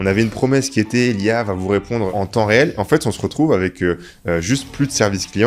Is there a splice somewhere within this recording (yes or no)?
yes